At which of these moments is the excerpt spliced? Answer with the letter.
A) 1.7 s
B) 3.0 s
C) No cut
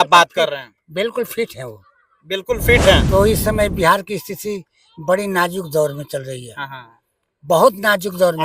B